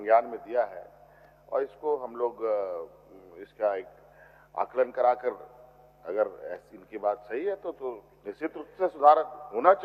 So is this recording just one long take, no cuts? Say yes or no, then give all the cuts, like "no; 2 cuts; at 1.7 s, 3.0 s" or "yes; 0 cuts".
yes; 0 cuts